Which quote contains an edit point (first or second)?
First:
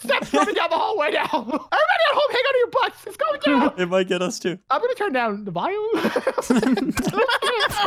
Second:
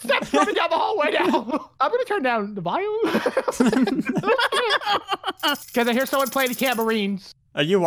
first